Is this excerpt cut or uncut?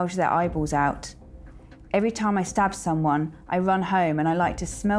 uncut